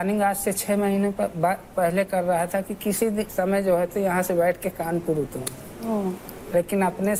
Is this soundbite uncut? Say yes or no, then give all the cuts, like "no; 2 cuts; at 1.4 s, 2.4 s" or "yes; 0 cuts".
yes; 0 cuts